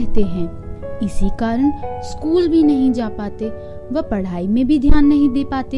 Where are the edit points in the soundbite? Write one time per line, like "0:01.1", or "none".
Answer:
none